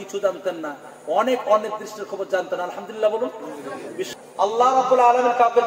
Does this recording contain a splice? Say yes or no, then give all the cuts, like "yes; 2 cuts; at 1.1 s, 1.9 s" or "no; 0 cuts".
yes; 1 cut; at 4.1 s